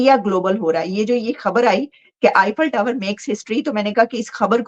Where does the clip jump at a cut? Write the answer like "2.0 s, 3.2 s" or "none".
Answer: none